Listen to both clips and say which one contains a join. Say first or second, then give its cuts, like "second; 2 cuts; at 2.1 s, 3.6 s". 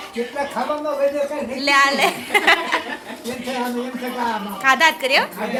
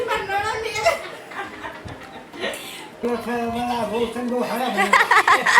second; 1 cut; at 3.0 s